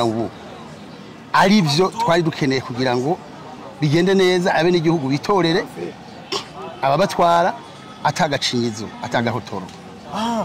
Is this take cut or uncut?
uncut